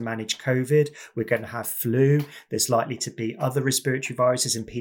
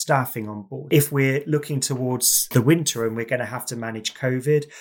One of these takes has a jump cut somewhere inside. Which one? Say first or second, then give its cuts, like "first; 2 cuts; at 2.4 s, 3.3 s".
second; 2 cuts; at 0.9 s, 2.5 s